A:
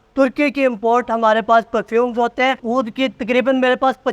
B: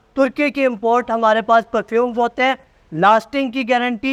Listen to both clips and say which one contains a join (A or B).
A